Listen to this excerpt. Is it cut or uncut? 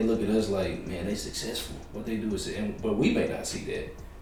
uncut